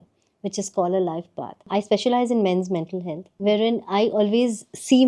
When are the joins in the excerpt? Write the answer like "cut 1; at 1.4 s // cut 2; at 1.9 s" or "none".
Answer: cut 1; at 1.7 s // cut 2; at 3.2 s